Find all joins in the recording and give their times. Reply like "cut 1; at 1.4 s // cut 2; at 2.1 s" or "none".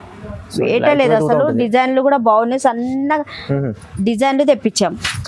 none